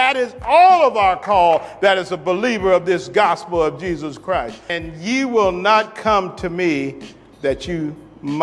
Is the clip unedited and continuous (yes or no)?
no